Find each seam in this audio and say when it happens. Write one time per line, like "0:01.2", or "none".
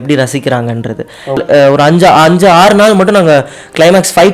0:01.4